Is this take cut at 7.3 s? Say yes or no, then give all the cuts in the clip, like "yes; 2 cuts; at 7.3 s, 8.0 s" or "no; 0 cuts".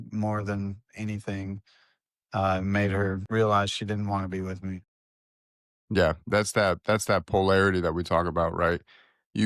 no; 1 cut; at 3.2 s